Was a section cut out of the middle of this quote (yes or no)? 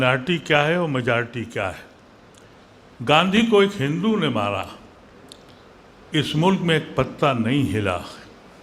no